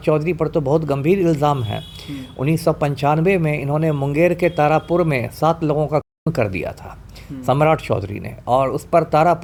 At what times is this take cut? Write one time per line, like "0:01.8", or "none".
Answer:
none